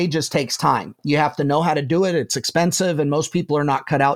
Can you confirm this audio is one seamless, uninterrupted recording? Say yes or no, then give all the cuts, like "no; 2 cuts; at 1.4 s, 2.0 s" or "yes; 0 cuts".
yes; 0 cuts